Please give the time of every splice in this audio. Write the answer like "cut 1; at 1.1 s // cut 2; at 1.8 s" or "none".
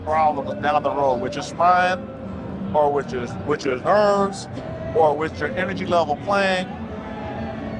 none